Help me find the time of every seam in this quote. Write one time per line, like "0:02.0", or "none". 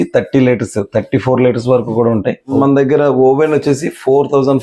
0:02.5